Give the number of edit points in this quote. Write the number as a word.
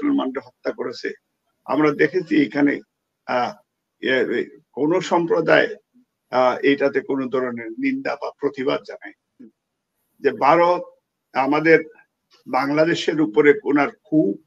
one